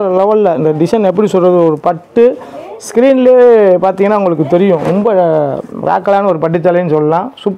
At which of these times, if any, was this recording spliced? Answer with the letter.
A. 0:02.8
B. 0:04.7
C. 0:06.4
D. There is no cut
D